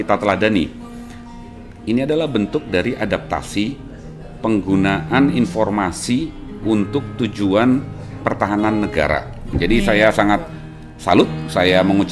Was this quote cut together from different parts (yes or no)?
yes